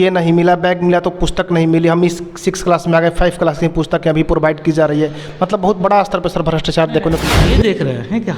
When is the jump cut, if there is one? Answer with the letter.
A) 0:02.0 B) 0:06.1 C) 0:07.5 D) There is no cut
C